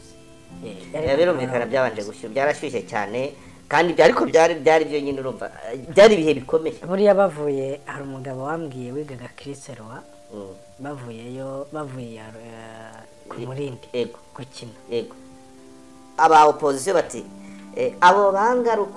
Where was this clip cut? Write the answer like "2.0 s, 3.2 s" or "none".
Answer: 16.2 s